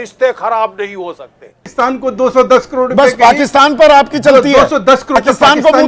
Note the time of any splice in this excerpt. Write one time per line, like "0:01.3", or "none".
0:01.7
0:05.2

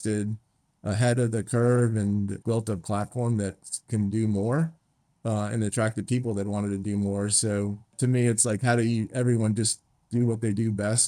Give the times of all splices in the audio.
0:02.4
0:08.0

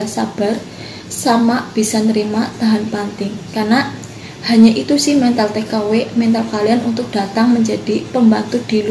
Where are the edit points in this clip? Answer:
none

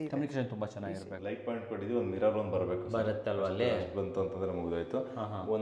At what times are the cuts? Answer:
0:01.1

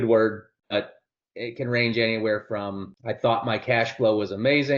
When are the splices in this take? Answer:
0:02.9

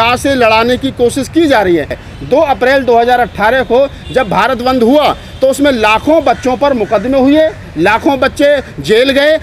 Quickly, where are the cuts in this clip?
0:01.9

